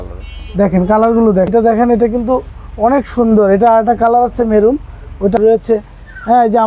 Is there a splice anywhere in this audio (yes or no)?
yes